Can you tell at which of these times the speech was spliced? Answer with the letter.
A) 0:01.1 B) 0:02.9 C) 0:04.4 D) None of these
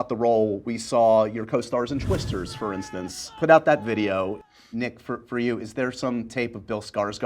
C